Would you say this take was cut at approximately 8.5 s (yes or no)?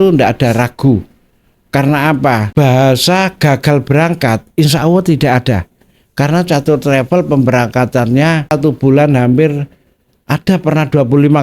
yes